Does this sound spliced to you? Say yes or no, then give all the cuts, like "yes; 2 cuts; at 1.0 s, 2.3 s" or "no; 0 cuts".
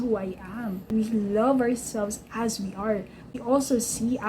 yes; 2 cuts; at 0.9 s, 3.3 s